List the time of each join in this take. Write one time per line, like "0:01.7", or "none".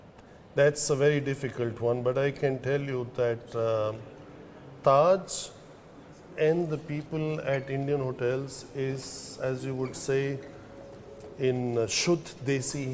0:01.1

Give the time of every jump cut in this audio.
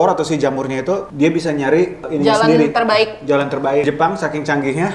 0:03.8

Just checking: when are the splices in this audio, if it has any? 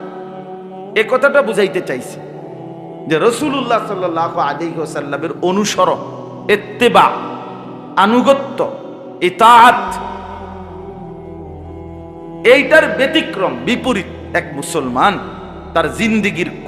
0:10.1
0:11.8

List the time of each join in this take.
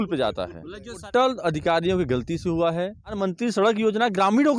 0:01.0
0:03.2

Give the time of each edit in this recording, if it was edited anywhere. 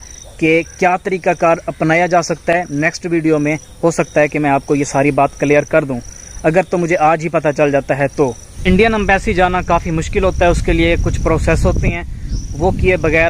none

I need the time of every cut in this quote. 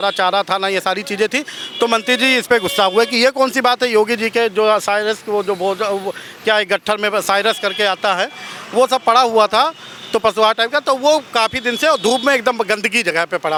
none

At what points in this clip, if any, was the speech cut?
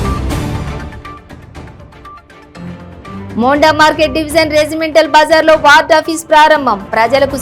0:01.9

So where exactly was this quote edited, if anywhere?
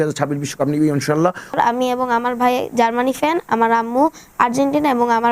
0:01.5

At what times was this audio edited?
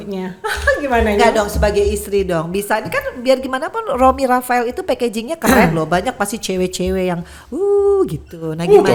none

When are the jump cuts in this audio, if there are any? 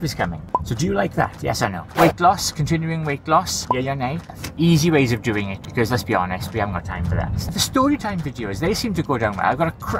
0:01.8
0:04.3
0:07.4

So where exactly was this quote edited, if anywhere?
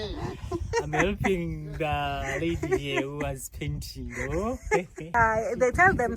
0:05.1

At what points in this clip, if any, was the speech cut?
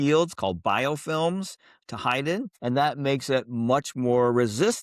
0:02.5

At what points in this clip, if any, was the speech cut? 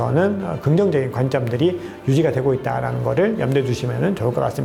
none

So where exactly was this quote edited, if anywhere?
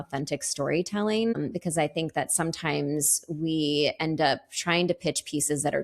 0:01.3

